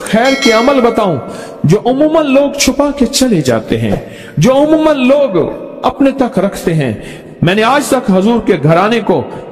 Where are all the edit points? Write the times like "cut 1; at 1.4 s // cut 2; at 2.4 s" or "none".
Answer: cut 1; at 7.1 s